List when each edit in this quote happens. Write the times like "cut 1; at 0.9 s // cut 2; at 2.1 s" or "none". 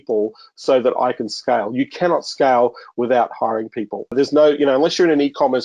cut 1; at 4.1 s

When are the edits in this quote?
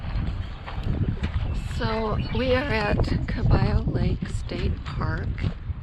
none

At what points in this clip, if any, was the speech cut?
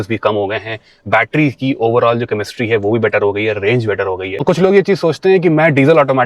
cut 1; at 4.3 s

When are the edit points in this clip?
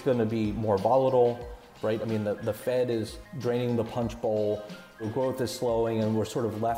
cut 1; at 1.7 s // cut 2; at 3.2 s // cut 3; at 5.1 s

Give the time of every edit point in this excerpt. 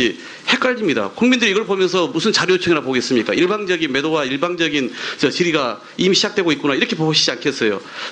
cut 1; at 3.3 s

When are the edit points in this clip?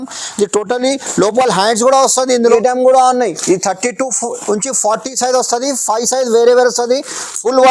cut 1; at 2.4 s

